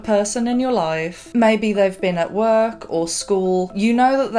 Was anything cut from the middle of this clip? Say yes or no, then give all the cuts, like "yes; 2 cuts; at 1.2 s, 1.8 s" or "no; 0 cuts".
no; 0 cuts